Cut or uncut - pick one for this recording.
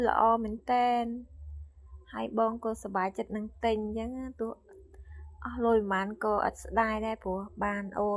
uncut